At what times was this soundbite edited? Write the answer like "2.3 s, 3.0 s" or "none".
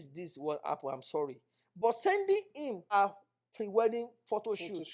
2.9 s

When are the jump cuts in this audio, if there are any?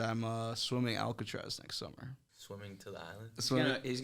2.3 s

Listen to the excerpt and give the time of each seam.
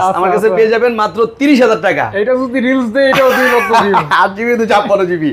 none

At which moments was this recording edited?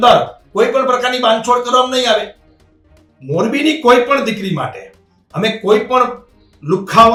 none

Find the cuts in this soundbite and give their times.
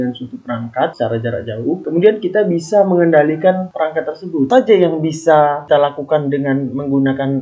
0.9 s, 4.5 s

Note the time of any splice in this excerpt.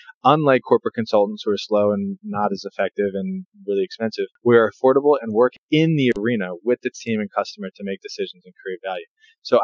3.5 s, 4.3 s, 5.6 s

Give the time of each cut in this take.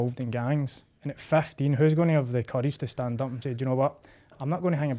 none

